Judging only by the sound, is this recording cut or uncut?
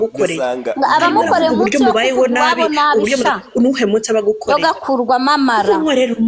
uncut